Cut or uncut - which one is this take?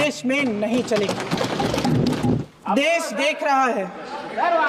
cut